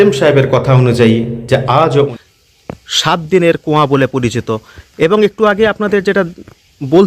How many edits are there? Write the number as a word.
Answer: one